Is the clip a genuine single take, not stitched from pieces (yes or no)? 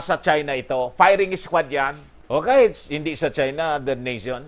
yes